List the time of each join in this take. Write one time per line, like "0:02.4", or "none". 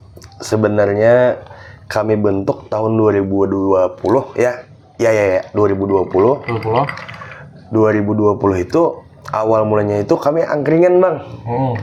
none